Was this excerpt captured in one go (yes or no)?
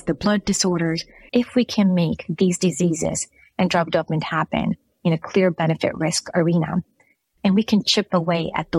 no